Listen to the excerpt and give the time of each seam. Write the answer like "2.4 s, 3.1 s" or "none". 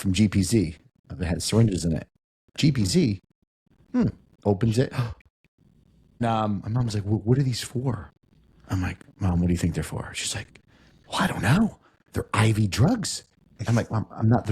6.2 s